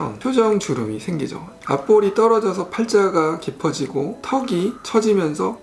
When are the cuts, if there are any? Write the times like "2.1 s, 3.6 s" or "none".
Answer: none

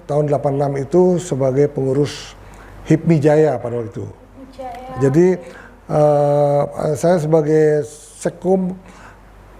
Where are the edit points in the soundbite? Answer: none

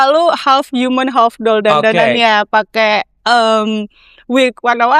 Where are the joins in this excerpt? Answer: none

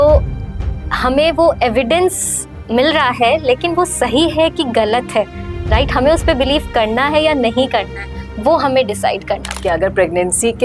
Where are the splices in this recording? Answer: 9.6 s

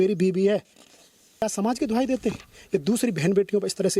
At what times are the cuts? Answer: 1.4 s

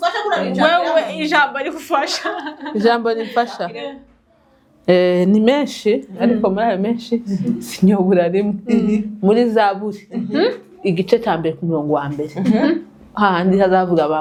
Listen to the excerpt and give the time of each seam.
none

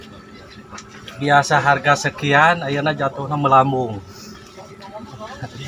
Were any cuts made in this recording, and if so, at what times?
none

